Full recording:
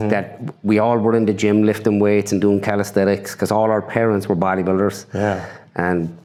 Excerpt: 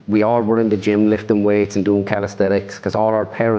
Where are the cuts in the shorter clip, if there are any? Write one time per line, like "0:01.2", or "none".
none